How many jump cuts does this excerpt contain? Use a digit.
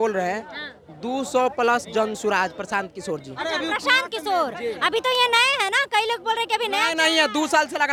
0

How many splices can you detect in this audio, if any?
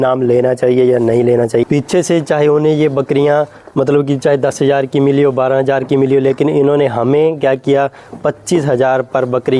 1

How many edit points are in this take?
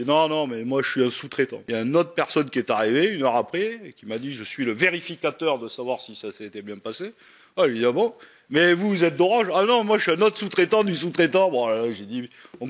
1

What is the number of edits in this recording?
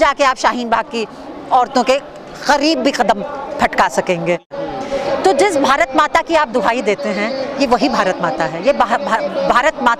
1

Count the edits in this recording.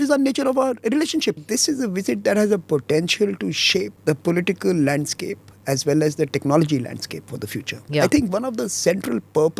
3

